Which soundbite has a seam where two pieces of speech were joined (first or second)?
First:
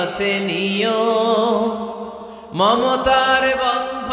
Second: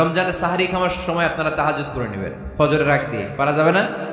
second